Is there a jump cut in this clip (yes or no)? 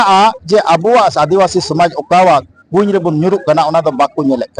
no